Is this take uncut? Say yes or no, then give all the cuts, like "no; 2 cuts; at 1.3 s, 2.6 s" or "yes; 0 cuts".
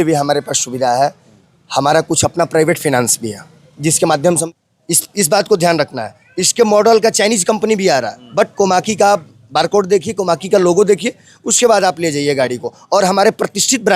no; 1 cut; at 4.4 s